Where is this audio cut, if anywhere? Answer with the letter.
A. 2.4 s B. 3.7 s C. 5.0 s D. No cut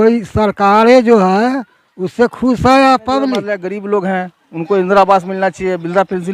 B